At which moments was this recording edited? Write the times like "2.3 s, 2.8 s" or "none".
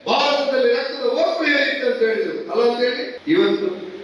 3.1 s